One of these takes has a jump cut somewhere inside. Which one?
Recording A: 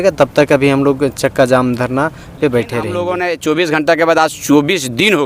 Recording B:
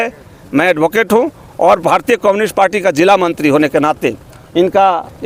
A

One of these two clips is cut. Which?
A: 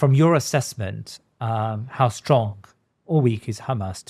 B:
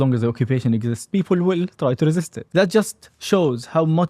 B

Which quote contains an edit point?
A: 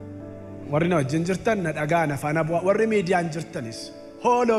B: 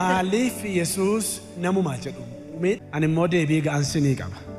B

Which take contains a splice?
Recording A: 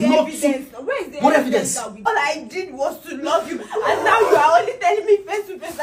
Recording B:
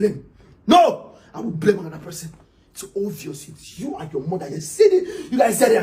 A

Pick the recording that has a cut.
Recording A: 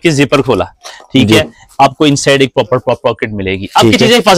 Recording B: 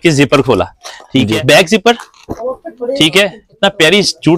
B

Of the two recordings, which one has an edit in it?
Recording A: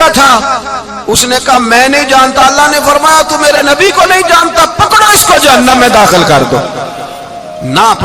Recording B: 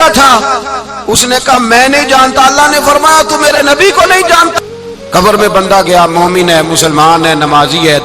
B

